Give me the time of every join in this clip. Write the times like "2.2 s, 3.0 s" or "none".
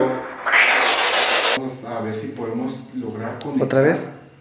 1.6 s